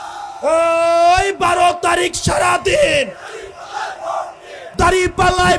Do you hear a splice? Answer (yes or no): yes